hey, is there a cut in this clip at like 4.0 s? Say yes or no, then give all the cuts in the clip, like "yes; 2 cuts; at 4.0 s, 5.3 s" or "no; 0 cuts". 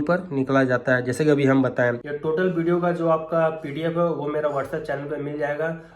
no; 1 cut; at 2.0 s